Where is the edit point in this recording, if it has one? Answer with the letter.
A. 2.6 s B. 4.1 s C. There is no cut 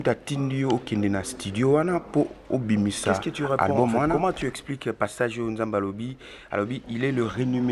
B